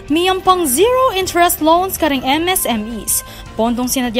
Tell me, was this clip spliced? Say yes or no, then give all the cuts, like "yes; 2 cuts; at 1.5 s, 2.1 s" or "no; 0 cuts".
no; 0 cuts